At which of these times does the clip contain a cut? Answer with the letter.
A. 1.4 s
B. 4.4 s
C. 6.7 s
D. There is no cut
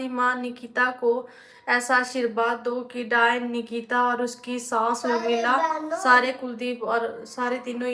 D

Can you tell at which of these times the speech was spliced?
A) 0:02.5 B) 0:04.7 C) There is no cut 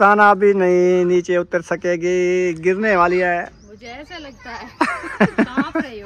C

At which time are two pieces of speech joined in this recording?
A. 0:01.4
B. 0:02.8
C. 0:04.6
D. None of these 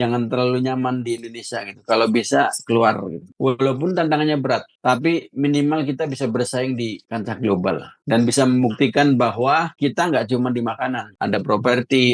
D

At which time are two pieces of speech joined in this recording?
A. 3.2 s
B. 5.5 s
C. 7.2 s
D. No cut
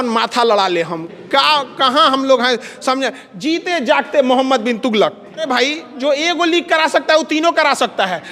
B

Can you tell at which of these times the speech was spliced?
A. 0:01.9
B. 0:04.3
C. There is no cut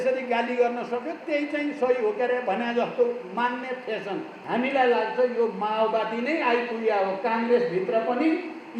B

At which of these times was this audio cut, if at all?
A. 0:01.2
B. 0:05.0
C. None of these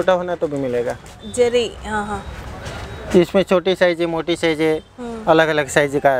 A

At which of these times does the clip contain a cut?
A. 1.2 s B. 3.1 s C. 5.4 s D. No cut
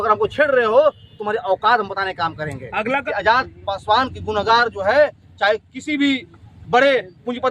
B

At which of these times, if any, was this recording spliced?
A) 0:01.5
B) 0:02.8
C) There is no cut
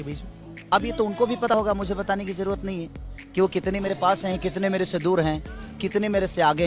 A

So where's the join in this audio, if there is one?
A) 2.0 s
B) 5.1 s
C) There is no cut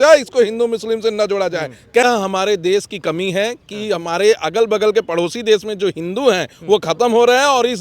A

